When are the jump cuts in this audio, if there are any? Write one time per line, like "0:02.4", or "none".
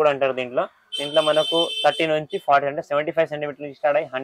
none